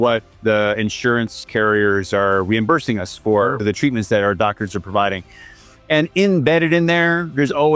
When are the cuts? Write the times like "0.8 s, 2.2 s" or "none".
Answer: 3.6 s